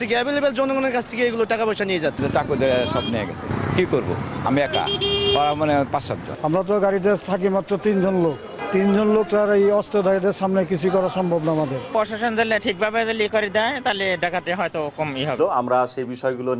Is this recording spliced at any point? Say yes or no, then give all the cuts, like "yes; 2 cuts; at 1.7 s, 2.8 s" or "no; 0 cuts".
yes; 6 cuts; at 2.2 s, 3.5 s, 6.3 s, 8.5 s, 11.9 s, 15.4 s